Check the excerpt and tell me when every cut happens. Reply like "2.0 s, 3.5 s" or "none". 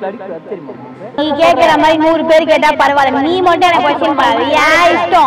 1.2 s